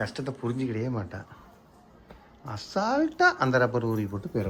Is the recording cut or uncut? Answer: uncut